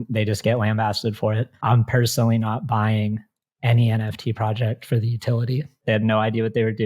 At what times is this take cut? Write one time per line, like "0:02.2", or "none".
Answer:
0:01.5
0:05.7